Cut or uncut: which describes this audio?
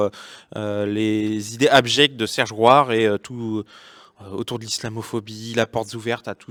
uncut